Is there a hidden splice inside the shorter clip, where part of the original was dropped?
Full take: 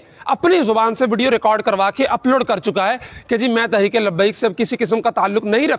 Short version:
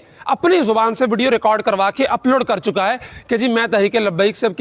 no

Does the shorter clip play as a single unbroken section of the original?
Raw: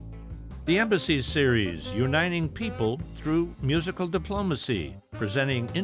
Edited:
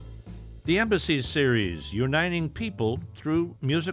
yes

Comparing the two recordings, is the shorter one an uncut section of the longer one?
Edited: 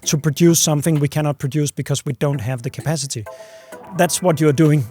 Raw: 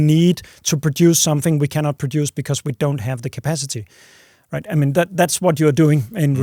no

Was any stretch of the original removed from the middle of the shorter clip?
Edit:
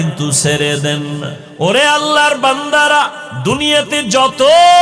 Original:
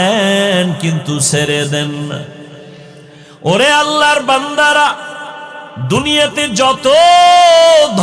yes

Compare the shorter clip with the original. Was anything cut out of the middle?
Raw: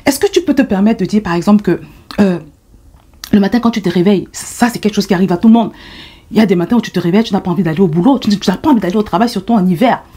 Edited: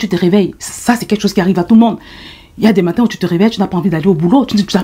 no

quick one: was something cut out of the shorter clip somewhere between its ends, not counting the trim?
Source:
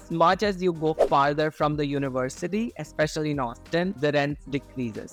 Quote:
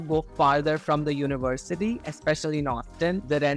no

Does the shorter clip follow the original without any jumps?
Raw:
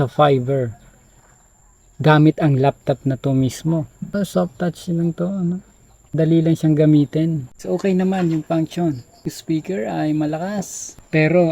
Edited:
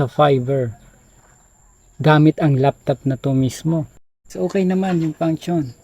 no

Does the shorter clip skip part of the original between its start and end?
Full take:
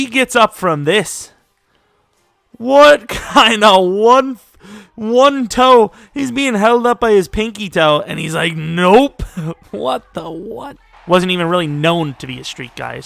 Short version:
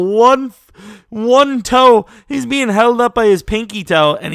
no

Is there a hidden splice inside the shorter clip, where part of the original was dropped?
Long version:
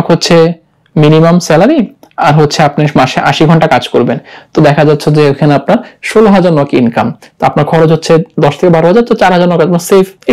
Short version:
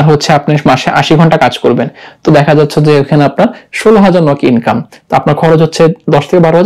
no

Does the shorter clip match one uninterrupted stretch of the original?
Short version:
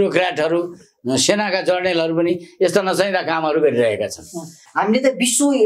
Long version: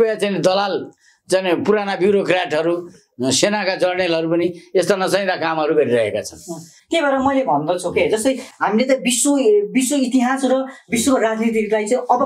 no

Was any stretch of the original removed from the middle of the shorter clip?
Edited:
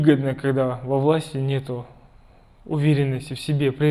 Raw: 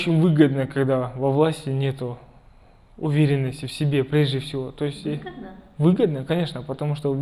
no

